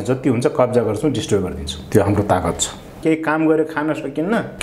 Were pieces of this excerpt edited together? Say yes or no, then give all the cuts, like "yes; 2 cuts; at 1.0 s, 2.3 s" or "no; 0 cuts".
yes; 1 cut; at 3.0 s